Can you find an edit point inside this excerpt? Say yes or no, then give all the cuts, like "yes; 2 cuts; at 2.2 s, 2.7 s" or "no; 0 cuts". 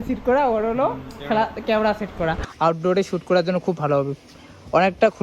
yes; 1 cut; at 2.5 s